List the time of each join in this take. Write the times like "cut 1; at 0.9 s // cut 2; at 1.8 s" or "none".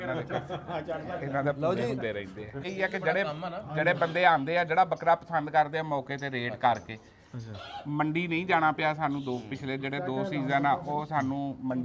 cut 1; at 2.7 s